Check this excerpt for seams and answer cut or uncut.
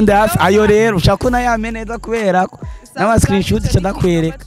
uncut